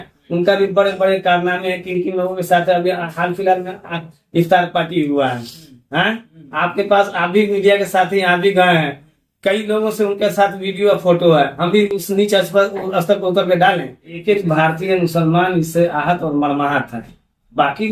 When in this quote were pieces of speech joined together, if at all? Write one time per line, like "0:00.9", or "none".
0:14.2